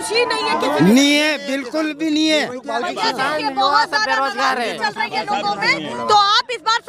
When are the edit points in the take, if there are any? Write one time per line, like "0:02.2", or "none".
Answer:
none